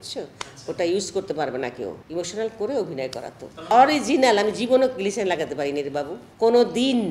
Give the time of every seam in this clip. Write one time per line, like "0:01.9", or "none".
0:02.0
0:03.7
0:06.2